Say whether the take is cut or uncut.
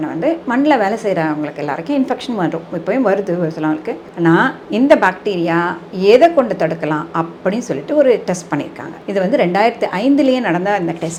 uncut